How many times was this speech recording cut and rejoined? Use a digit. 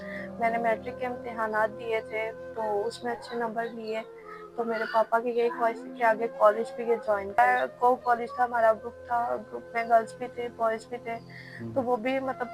1